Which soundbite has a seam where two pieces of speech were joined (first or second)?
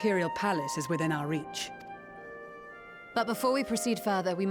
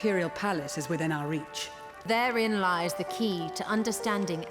second